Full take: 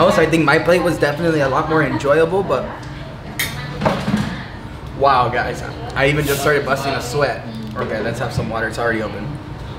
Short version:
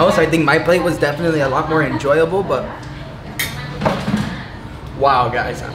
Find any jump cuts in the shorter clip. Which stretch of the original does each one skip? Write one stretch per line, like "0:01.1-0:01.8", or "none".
none

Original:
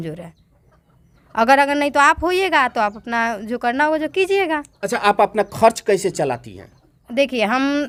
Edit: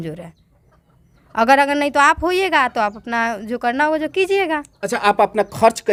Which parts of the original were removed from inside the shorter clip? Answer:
none

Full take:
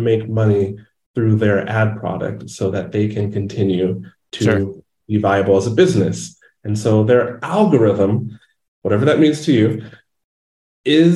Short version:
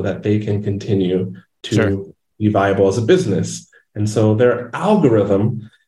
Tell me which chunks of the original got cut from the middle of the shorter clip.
none

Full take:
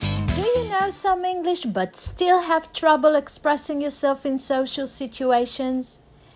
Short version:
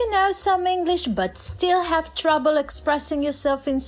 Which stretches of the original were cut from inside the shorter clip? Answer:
none

